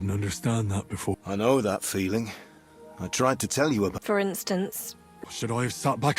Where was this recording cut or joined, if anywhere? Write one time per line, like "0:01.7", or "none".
0:01.2
0:04.0
0:05.2